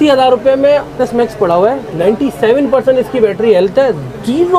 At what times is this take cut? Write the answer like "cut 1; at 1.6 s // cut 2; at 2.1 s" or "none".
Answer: cut 1; at 0.9 s // cut 2; at 1.9 s